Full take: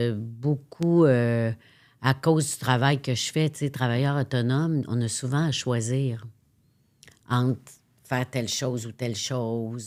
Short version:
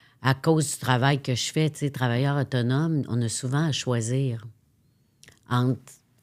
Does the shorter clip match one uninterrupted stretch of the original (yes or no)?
yes